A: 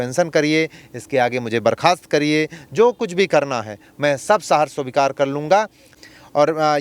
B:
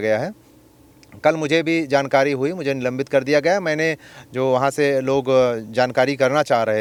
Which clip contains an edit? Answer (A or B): A